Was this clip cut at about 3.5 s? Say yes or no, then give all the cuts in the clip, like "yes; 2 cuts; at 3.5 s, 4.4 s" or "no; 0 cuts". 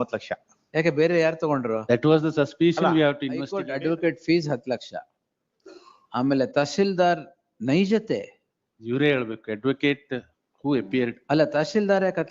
yes; 1 cut; at 3.5 s